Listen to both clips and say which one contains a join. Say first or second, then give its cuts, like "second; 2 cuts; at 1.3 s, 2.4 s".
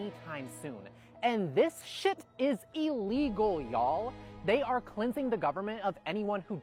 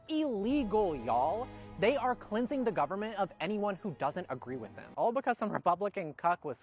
second; 1 cut; at 4.9 s